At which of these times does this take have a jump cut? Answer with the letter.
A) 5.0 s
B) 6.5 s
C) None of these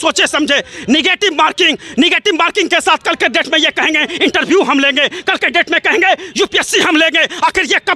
C